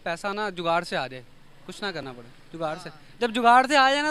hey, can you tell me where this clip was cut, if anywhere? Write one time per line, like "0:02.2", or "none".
none